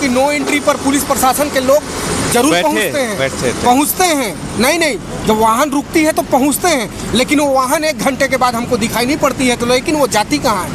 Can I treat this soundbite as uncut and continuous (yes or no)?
yes